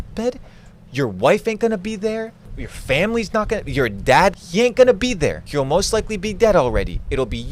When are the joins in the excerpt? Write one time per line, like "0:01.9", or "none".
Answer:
0:04.3
0:05.4